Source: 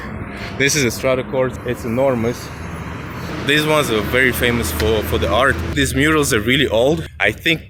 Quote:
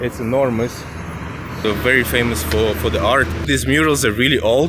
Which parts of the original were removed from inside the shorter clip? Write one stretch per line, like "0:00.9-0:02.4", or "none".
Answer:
0:03.3-0:03.9